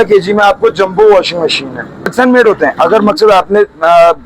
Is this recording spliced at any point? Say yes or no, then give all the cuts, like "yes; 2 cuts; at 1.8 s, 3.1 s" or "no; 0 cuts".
yes; 1 cut; at 2.1 s